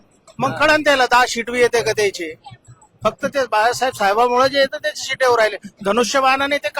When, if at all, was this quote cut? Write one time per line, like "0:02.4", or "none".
none